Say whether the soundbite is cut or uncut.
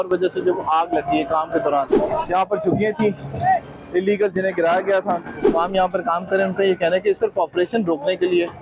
cut